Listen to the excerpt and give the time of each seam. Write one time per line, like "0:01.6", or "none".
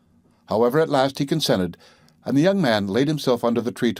none